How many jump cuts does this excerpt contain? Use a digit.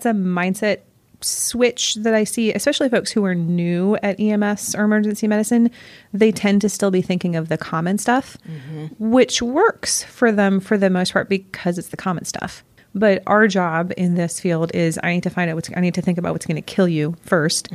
1